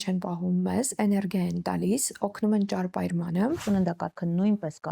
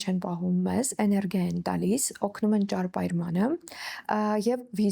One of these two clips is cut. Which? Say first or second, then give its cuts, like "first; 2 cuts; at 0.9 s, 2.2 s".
first; 1 cut; at 3.6 s